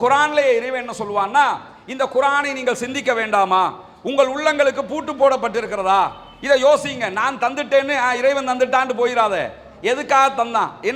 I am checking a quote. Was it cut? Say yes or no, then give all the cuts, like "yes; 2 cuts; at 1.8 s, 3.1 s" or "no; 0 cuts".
no; 0 cuts